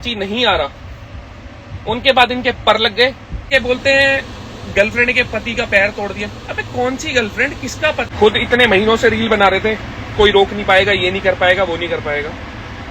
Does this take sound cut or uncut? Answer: cut